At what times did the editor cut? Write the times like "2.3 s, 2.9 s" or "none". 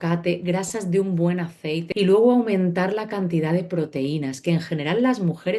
1.9 s